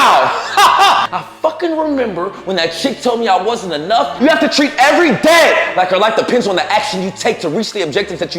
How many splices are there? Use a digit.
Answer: 2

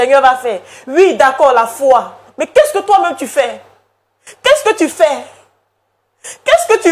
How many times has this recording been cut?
0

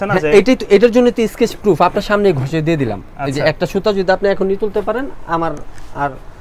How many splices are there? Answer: 0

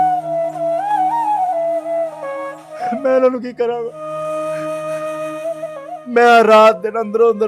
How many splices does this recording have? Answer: 3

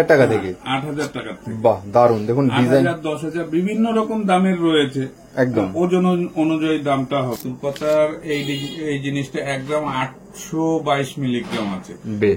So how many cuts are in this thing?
1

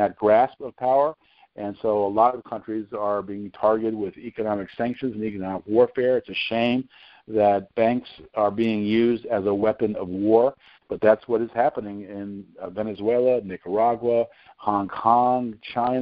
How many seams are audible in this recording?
0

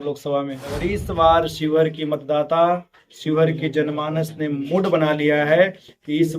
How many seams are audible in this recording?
1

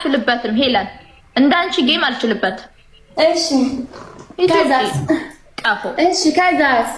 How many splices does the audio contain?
0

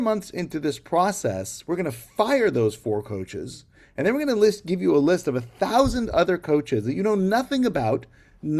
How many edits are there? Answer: 0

